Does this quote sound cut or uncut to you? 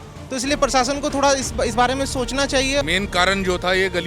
cut